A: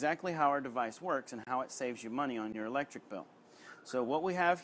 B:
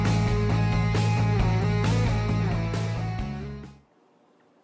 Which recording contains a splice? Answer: A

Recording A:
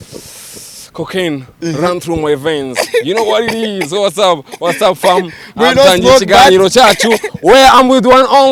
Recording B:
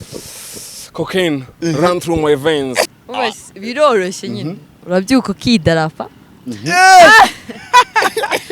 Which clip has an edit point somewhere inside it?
B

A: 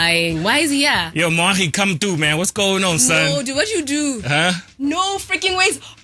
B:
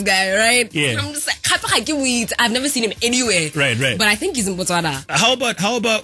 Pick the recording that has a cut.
B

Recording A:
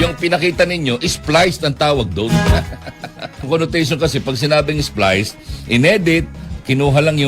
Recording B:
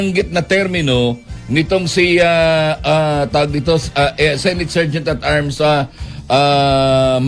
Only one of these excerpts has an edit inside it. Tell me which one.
A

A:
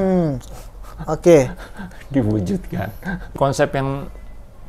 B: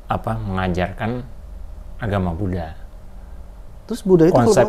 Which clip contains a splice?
A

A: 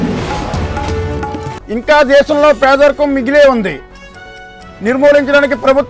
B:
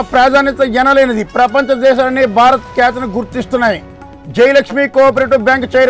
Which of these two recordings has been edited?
A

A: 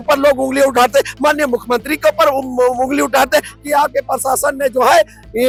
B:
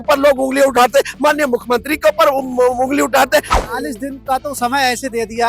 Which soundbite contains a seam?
B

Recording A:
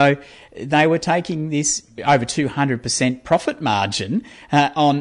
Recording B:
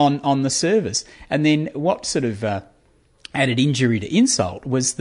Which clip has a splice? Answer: A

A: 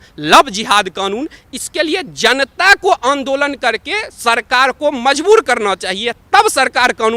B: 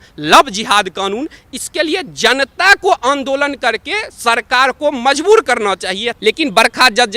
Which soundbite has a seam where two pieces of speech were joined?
B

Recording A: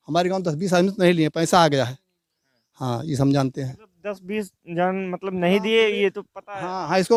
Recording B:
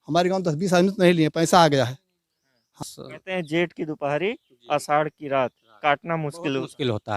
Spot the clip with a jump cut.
B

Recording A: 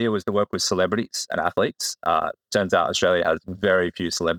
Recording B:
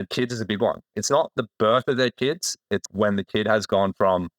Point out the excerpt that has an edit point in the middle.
B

